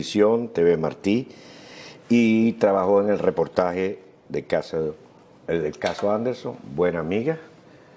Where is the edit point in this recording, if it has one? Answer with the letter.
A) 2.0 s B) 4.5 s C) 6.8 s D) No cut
A